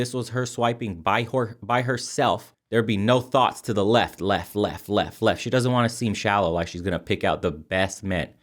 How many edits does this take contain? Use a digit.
1